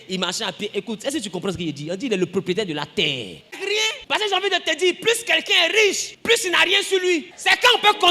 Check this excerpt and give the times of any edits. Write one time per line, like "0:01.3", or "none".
0:03.6

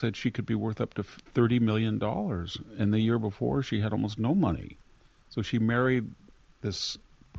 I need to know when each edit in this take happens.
none

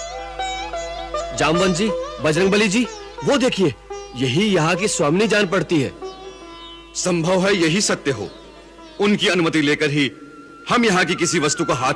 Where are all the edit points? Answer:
none

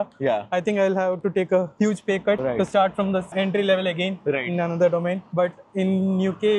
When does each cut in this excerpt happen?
none

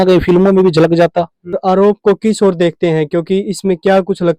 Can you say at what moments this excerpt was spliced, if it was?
0:01.5

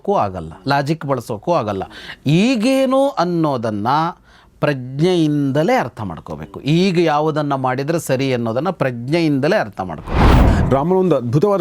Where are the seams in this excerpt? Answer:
0:10.4

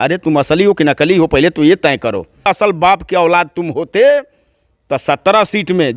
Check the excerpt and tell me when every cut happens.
0:02.5

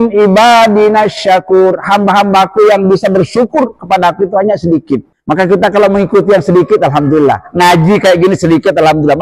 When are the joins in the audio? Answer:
0:05.1

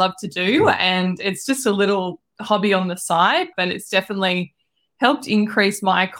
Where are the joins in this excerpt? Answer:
0:03.5

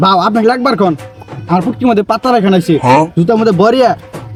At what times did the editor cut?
none

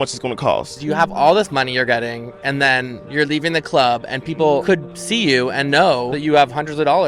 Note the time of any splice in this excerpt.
0:00.8
0:04.7
0:06.1

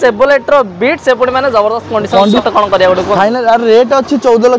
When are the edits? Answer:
0:02.4

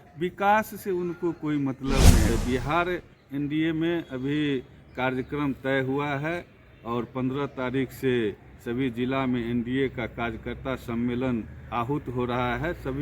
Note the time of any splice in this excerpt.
0:02.3

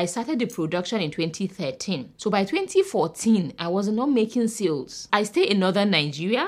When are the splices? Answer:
0:05.0

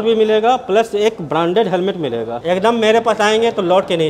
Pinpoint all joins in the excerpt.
0:02.4

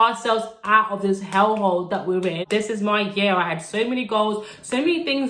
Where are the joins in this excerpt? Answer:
0:02.4

